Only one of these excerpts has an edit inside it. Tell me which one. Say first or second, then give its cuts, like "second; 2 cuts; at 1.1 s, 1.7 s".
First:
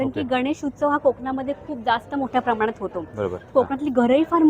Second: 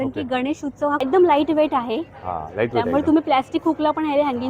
second; 1 cut; at 1.0 s